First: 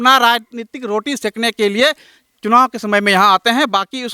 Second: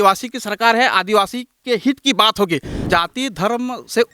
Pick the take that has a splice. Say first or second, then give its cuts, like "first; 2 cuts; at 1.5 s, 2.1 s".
second; 1 cut; at 2.8 s